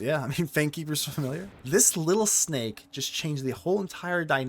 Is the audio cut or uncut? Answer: cut